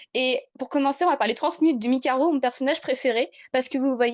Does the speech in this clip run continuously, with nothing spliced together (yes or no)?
yes